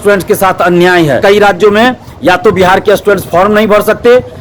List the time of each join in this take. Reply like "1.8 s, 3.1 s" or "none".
1.2 s